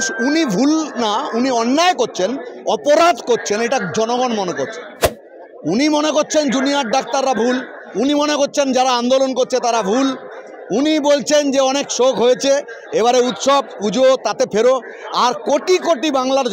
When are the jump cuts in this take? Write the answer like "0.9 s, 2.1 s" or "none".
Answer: none